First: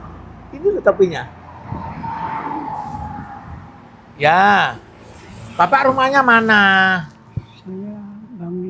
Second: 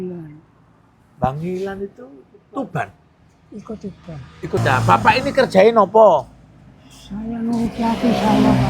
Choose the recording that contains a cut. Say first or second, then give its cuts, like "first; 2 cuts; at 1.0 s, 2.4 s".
second; 1 cut; at 4.6 s